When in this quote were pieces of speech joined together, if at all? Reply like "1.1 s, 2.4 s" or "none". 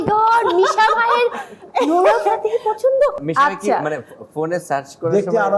3.2 s